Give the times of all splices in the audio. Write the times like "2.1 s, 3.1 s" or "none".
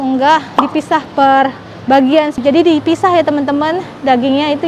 2.4 s